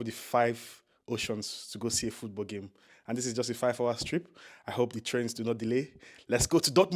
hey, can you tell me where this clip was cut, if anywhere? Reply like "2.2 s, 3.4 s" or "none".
none